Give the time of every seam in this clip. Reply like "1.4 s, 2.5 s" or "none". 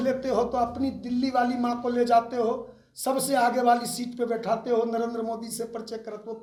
none

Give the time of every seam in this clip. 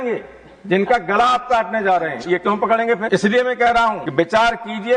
3.0 s, 4.0 s

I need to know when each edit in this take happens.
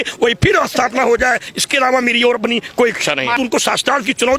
3.4 s

